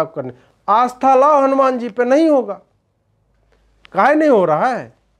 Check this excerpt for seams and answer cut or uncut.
uncut